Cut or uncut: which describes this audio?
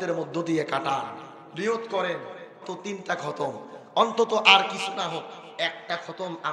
cut